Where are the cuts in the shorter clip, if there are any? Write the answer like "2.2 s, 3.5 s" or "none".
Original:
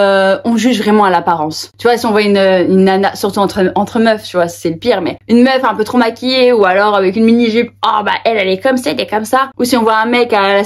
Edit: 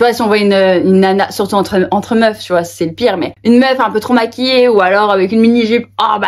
none